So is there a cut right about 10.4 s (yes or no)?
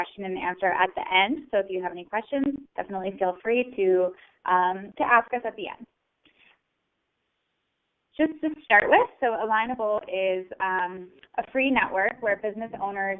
yes